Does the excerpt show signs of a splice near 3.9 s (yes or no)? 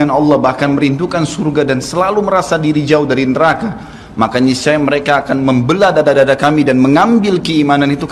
no